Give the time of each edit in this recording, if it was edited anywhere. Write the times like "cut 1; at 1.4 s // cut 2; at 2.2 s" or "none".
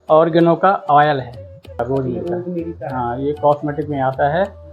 cut 1; at 1.8 s